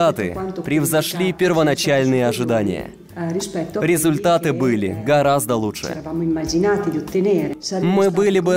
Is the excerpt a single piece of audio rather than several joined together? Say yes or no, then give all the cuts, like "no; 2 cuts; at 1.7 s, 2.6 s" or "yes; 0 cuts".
no; 1 cut; at 7.6 s